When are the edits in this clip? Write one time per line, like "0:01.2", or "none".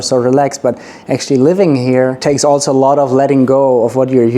0:02.2